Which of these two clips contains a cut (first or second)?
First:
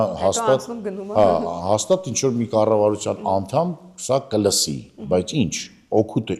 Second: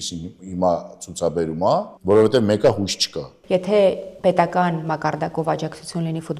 second